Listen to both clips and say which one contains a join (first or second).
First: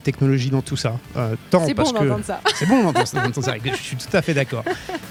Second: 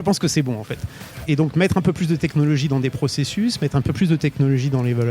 second